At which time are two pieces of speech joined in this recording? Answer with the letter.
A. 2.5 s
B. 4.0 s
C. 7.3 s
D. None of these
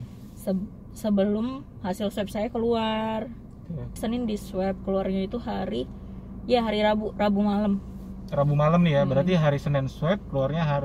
B